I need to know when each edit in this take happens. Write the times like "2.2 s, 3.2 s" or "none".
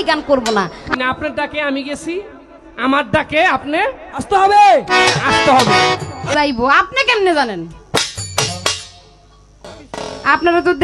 0.9 s, 6.3 s